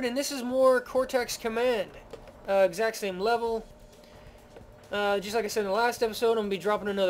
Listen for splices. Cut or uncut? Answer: uncut